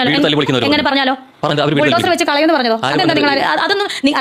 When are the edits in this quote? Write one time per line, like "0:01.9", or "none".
0:01.5

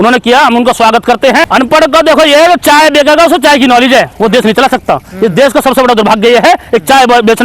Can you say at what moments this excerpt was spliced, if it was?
0:01.5

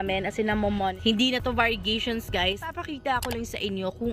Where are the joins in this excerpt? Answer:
0:01.0
0:02.7

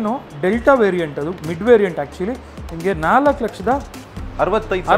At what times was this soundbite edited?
none

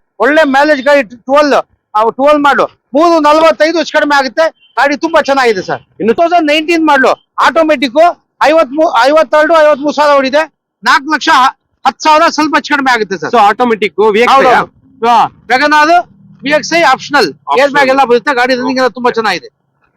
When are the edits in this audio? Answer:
0:06.2

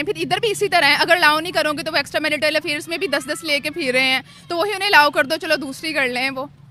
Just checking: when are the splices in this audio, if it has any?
none

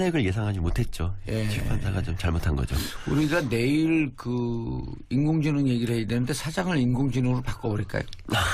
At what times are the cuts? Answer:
0:02.8

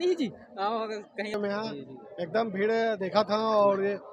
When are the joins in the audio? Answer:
0:01.3

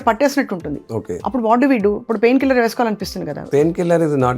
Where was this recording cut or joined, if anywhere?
0:01.1
0:03.5

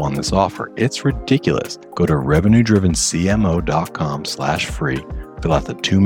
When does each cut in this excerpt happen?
0:01.8

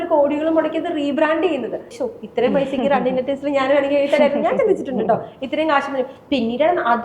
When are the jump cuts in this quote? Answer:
0:02.0

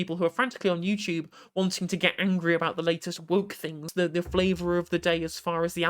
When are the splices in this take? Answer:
0:03.9

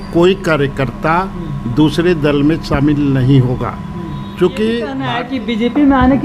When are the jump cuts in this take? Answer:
0:05.2

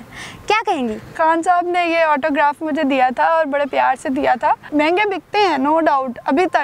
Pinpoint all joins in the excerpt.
0:01.1
0:04.6

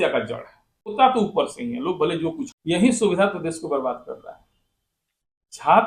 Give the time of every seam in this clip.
0:00.9
0:02.4

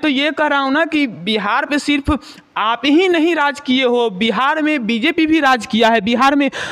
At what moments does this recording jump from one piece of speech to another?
none

